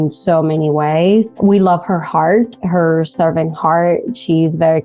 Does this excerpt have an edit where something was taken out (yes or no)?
yes